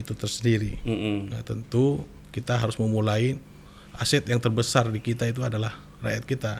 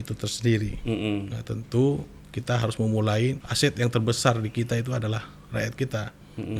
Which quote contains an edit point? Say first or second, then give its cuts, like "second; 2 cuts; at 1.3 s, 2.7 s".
second; 1 cut; at 3.5 s